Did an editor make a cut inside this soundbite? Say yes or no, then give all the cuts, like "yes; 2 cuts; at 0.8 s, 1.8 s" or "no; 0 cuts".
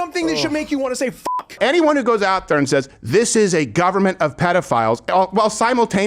yes; 1 cut; at 1.6 s